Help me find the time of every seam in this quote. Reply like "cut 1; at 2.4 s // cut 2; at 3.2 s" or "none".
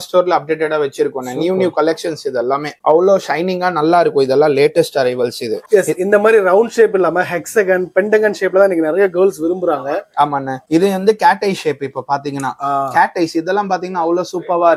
none